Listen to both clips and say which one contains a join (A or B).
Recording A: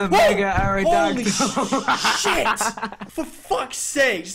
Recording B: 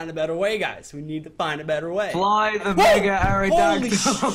A